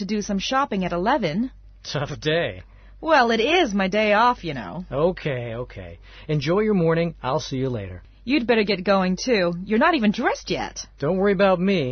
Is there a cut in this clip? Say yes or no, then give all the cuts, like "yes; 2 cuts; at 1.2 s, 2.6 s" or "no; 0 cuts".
no; 0 cuts